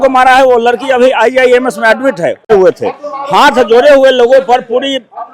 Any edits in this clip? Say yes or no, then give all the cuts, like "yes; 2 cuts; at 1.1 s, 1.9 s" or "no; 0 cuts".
yes; 1 cut; at 2.4 s